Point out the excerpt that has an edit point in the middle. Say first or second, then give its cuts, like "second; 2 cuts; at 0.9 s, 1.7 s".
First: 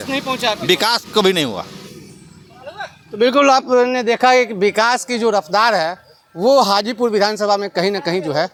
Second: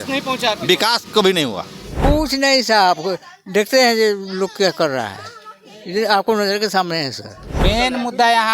second; 2 cuts; at 2.0 s, 7.6 s